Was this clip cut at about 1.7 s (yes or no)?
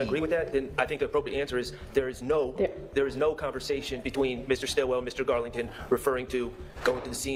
no